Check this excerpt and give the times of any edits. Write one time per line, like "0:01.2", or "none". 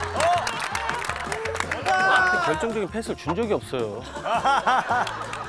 0:02.5